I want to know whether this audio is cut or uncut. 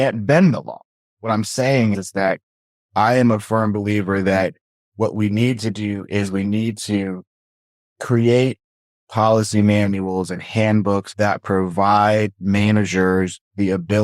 cut